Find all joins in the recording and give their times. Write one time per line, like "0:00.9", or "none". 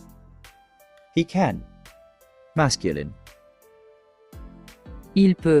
0:01.1